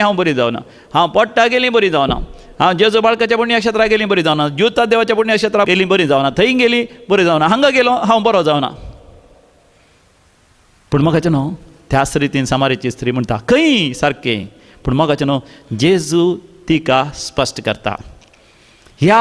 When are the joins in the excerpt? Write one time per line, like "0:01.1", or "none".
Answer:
0:05.7